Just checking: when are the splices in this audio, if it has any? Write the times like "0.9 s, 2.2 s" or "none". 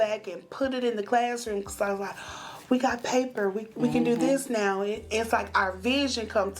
none

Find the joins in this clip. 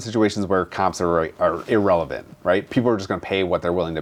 none

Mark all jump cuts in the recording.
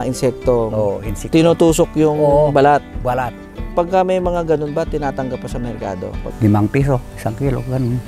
3.7 s, 6.2 s

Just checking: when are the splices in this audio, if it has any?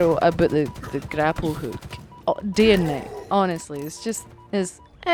none

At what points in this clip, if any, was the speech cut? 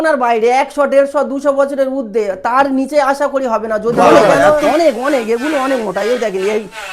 4.6 s

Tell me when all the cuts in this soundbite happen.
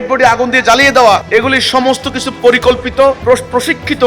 1.2 s, 3.2 s

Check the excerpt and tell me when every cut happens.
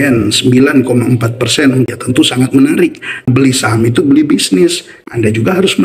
1.9 s, 3.3 s, 4.9 s

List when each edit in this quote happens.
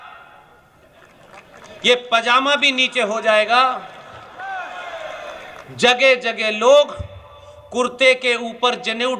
4.2 s

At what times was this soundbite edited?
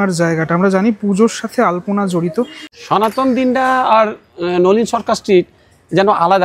2.6 s

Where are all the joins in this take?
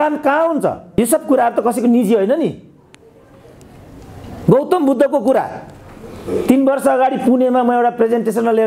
none

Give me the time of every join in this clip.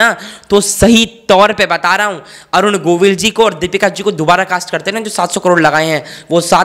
none

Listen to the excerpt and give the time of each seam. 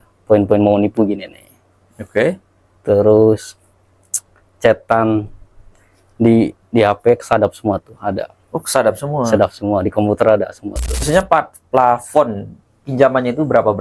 11.0 s

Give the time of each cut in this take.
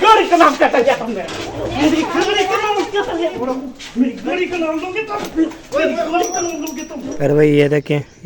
3.3 s, 7.1 s

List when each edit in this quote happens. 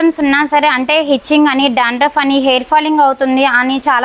none

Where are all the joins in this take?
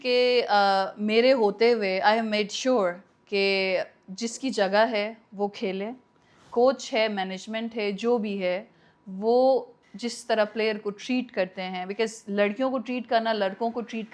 none

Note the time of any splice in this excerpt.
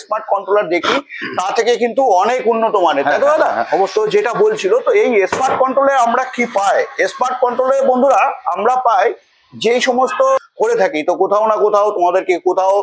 10.4 s

